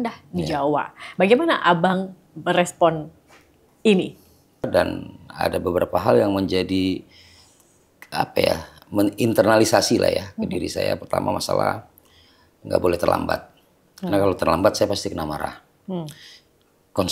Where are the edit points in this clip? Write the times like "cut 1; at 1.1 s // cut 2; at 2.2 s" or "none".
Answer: cut 1; at 4.7 s